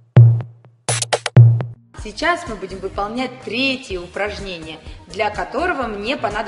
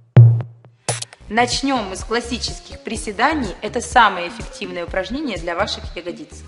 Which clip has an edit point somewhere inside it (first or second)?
second